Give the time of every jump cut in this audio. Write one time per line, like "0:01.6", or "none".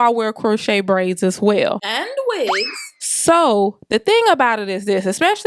none